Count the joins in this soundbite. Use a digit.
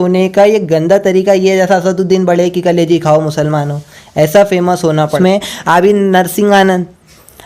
1